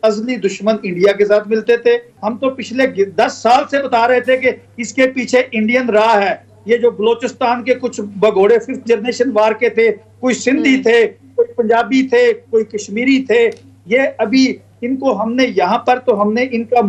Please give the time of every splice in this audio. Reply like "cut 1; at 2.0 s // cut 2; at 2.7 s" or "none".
none